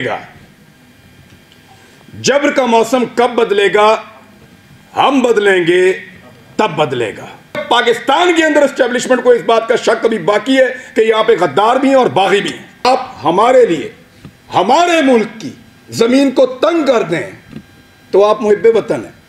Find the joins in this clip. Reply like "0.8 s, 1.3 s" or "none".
7.6 s, 12.8 s